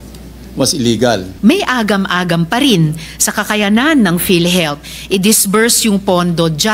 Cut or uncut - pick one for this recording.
cut